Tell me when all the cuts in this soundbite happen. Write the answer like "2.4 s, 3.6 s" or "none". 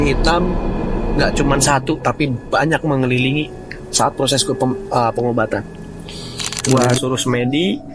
6.7 s

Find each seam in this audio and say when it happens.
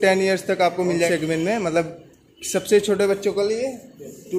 1.1 s

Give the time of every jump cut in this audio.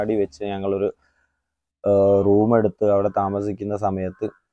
none

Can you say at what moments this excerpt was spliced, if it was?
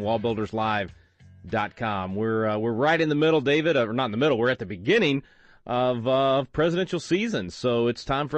3.2 s

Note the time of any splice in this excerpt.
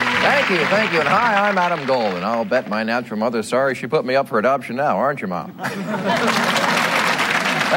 none

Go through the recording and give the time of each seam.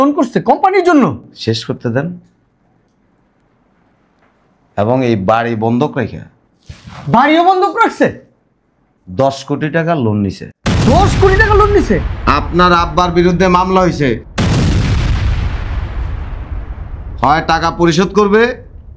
12.1 s

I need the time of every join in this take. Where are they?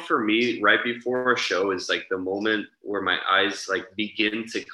none

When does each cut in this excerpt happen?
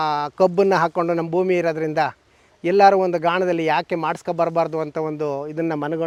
none

